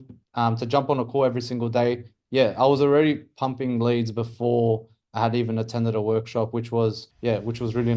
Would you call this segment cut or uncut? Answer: cut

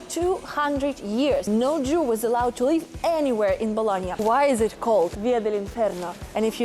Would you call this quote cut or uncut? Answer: cut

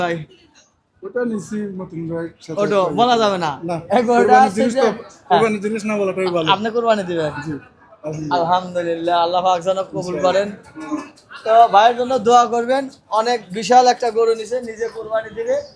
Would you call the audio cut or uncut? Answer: uncut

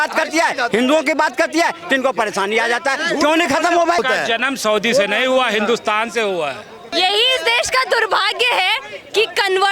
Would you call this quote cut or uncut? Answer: cut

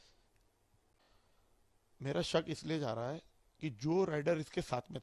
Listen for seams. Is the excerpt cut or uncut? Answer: cut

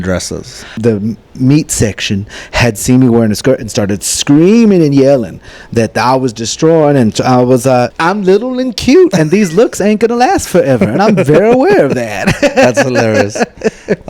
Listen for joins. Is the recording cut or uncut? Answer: cut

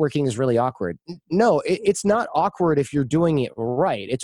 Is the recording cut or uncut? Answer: uncut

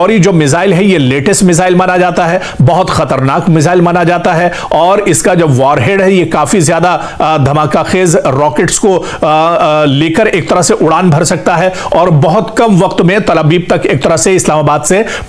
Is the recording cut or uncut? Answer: uncut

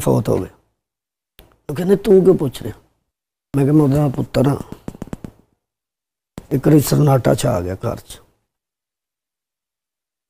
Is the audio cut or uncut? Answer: uncut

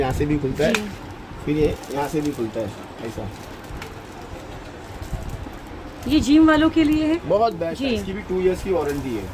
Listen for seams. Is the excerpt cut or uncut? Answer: cut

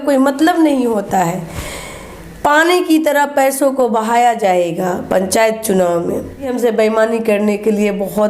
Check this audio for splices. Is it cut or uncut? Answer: cut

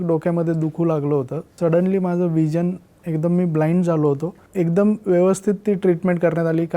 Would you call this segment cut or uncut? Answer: cut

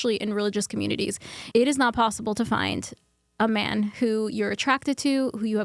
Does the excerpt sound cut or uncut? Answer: uncut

